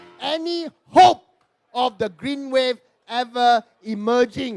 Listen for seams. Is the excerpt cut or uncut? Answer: uncut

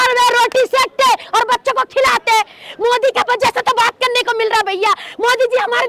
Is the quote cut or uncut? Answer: uncut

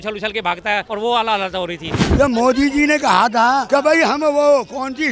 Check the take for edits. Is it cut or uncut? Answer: cut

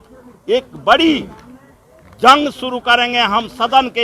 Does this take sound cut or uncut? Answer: uncut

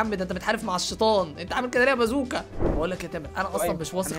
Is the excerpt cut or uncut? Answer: cut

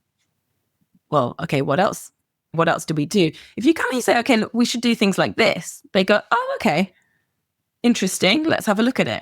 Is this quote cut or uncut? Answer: cut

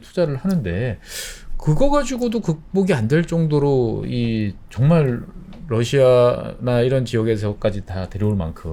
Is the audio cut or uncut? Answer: uncut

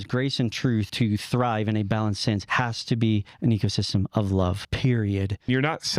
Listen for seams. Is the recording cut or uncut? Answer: cut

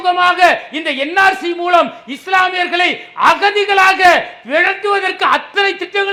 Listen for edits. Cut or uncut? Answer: uncut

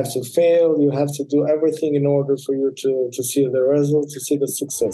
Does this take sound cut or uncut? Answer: uncut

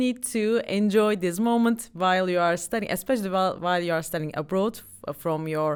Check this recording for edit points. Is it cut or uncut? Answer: uncut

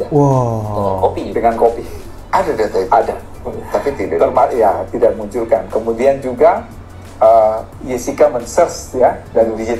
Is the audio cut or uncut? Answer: uncut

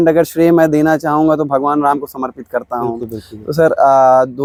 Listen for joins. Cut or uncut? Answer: uncut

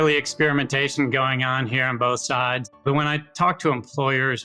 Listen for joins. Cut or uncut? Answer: uncut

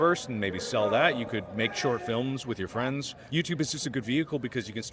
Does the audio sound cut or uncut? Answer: cut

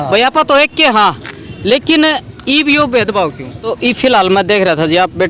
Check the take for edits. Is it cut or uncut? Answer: cut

